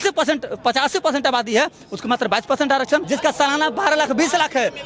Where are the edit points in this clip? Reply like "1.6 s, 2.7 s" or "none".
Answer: 3.0 s